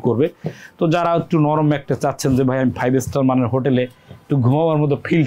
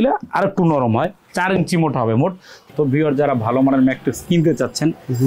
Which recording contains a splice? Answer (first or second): second